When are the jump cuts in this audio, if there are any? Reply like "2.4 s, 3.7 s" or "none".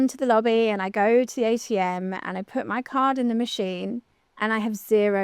none

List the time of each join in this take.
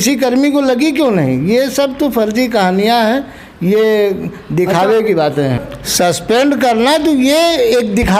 5.7 s

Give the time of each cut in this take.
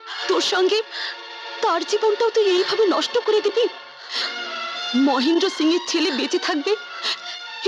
none

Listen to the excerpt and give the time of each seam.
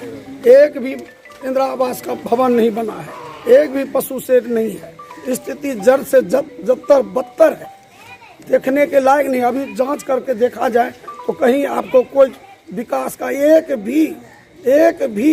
none

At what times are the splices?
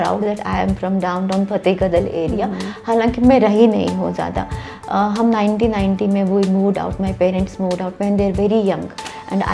none

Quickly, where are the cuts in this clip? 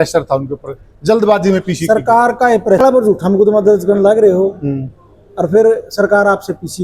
2.8 s

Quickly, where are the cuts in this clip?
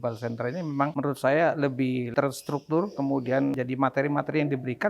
0.9 s, 2.1 s, 3.6 s

